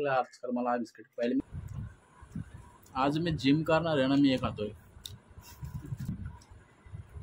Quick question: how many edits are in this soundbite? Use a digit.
2